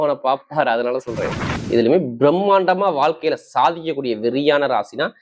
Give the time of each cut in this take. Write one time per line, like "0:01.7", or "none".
0:01.7

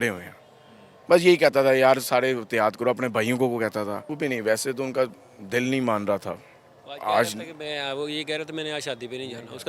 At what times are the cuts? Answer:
0:04.1

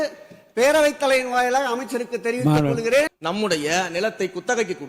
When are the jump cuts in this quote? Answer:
0:03.1

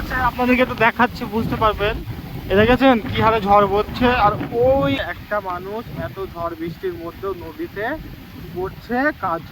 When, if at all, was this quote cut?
0:05.0

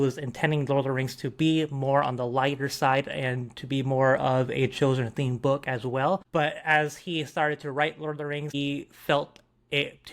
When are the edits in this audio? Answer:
0:06.2
0:08.5

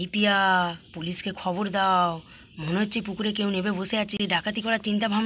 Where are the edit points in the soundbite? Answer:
0:04.1

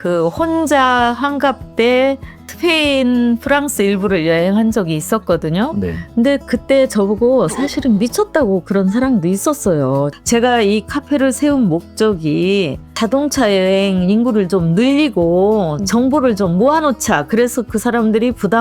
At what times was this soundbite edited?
0:10.1
0:12.8

